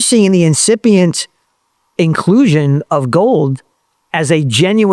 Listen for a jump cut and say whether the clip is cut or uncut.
uncut